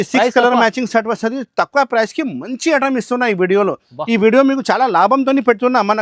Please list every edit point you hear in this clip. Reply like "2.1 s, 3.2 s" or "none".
none